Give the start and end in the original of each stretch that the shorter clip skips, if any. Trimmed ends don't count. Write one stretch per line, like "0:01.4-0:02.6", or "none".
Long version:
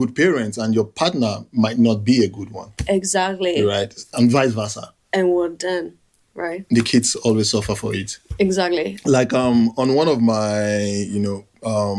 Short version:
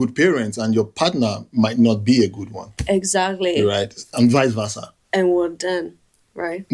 none